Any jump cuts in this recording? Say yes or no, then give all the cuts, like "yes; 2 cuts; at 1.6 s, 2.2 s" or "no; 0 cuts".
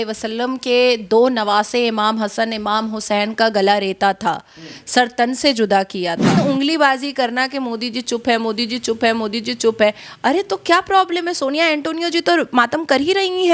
yes; 1 cut; at 6.3 s